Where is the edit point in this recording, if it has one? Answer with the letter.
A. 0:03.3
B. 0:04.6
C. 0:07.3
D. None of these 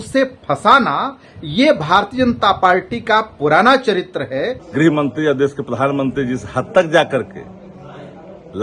B